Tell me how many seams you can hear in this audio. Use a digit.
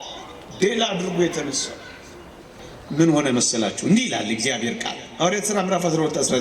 1